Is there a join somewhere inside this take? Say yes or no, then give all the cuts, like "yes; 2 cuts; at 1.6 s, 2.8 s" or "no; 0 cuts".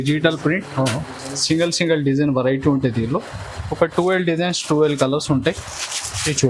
no; 0 cuts